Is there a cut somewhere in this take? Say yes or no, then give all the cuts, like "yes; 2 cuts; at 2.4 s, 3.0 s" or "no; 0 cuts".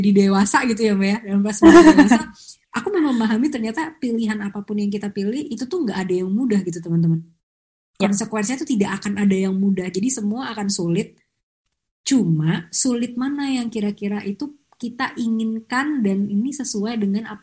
no; 0 cuts